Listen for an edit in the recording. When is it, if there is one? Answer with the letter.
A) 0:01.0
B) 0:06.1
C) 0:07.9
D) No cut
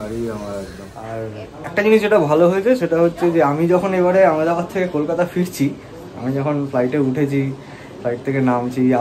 A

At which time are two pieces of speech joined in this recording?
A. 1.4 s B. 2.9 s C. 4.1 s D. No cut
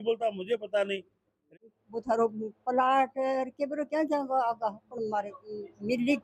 A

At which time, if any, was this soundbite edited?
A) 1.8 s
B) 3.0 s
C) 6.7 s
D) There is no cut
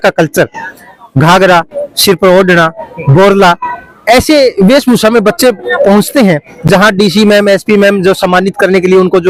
D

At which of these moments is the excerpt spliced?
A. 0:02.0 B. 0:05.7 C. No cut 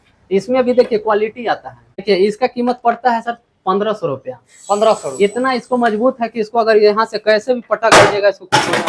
A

